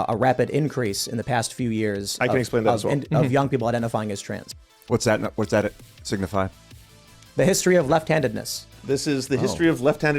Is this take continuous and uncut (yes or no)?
no